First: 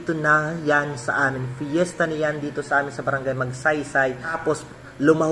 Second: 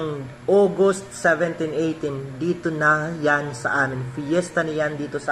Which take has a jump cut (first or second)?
first